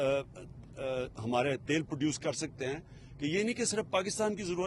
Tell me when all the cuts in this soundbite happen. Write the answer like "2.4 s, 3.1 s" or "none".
none